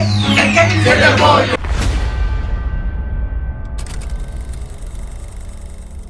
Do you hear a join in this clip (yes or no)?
yes